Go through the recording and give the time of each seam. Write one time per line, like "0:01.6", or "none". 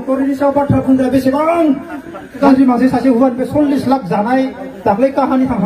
0:02.4